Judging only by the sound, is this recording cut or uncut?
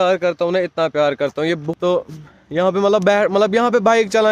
cut